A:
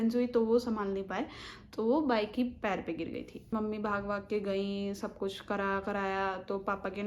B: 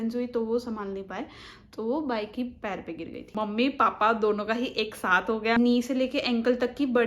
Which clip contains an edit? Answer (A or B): B